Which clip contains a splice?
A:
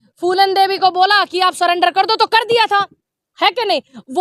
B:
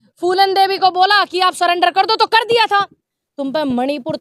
B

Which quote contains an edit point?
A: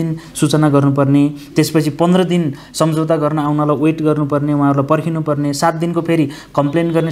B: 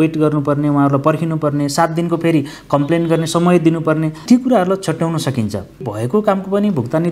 B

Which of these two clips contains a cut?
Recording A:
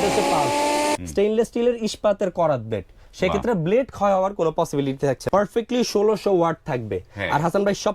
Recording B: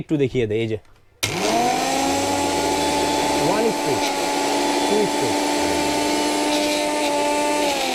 A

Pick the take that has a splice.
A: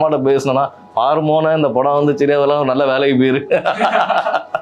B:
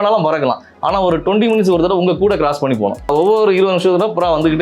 B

